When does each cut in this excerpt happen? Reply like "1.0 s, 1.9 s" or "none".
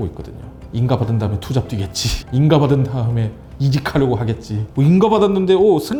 none